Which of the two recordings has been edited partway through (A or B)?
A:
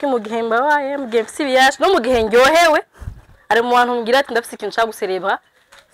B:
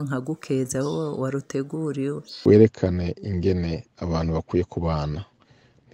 B